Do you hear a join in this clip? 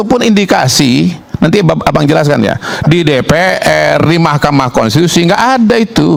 no; 0 cuts

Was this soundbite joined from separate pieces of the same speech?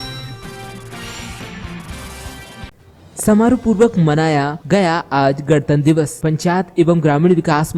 yes; 1 cut; at 2.8 s

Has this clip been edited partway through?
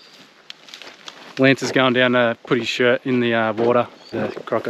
yes; 1 cut; at 1.3 s

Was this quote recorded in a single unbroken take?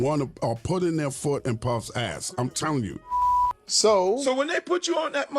no; 1 cut; at 4.2 s

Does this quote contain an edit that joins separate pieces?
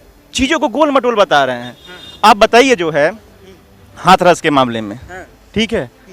no; 0 cuts

